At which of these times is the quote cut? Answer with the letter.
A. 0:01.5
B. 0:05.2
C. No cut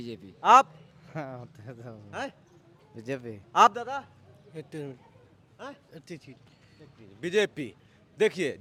C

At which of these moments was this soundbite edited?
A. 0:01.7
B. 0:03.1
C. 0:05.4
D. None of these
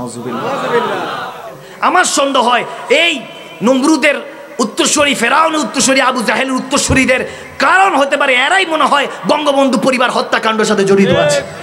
A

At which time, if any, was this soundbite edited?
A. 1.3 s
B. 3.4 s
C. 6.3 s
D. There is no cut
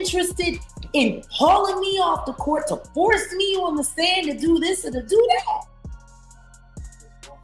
C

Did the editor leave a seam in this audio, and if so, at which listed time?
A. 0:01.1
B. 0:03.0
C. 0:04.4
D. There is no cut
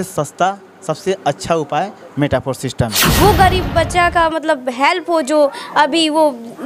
B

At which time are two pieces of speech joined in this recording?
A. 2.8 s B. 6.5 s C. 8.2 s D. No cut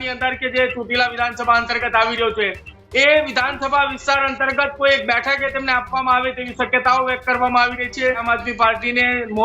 C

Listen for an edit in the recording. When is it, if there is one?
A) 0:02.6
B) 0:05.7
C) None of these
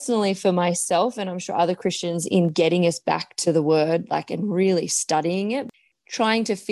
B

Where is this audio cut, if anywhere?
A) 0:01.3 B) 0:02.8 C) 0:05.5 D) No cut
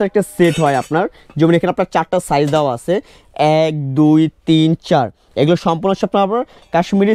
D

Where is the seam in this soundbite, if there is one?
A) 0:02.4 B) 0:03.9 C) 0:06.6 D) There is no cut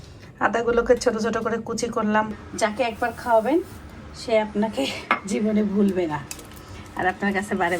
A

